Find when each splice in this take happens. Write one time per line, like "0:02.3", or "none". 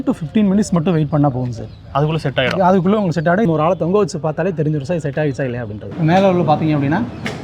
0:03.5
0:05.9